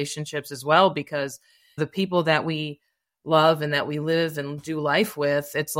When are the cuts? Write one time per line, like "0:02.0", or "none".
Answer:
0:01.8